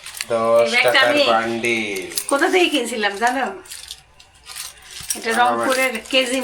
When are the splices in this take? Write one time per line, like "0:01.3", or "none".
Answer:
none